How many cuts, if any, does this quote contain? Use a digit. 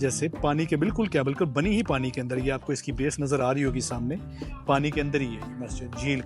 0